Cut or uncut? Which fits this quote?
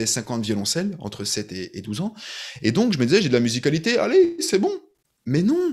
uncut